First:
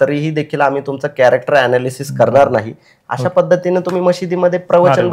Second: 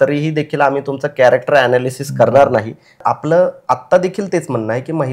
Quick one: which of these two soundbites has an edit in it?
second; 1 cut; at 3.0 s

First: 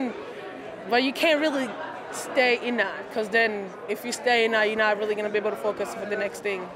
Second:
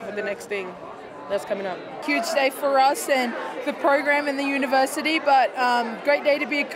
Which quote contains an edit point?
second; 1 cut; at 2.0 s

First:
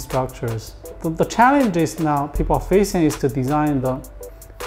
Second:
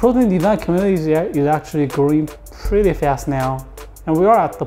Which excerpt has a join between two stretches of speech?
first; 1 cut; at 0.9 s

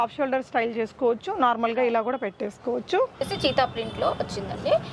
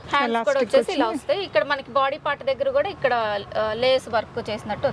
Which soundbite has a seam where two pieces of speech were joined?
first; 1 cut; at 3.3 s

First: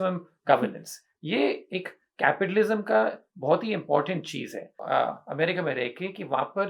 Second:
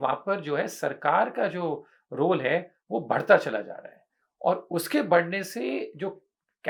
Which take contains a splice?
first; 1 cut; at 4.8 s

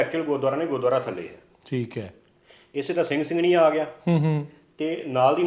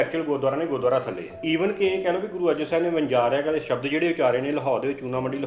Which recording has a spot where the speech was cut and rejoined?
second; 1 cut; at 1.4 s

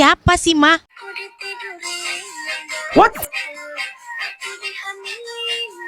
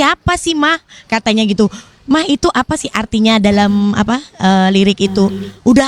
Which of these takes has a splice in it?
first; 1 cut; at 0.9 s

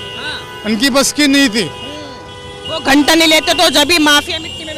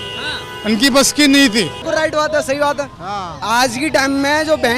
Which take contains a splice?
second; 1 cut; at 1.8 s

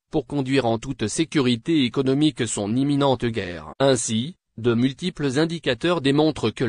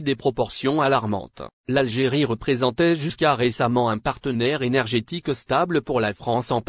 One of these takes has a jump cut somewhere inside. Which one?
second; 1 cut; at 1.1 s

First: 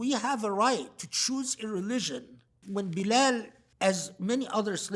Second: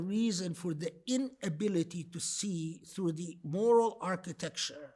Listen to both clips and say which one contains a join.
first; 2 cuts; at 2.6 s, 3.6 s

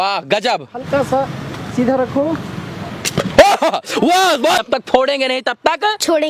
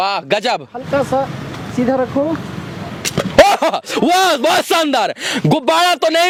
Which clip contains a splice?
first; 1 cut; at 4.6 s

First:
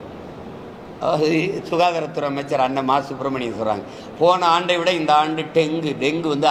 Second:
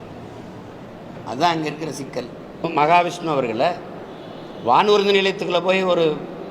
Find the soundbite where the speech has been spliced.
second; 1 cut; at 2.7 s

